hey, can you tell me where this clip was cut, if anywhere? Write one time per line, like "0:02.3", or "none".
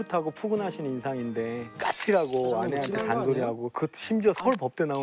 none